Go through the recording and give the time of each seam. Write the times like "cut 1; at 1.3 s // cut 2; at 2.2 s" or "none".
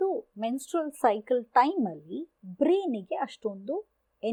none